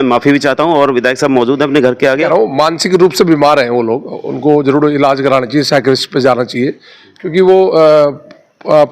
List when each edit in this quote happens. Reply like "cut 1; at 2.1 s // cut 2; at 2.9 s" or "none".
cut 1; at 2.1 s